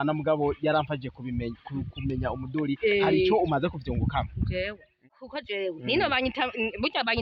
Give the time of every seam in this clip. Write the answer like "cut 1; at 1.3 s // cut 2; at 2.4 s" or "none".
cut 1; at 5.1 s